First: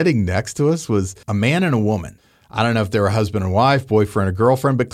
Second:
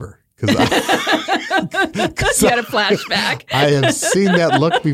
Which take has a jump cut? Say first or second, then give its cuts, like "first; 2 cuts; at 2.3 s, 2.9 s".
first; 2 cuts; at 1.2 s, 2.1 s